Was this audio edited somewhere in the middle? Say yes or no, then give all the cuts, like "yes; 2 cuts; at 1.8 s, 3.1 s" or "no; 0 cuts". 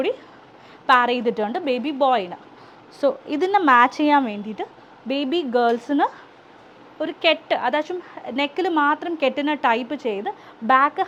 no; 0 cuts